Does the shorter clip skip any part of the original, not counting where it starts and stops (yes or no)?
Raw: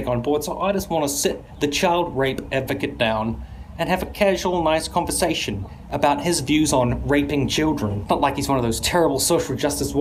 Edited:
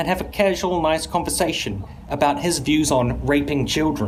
no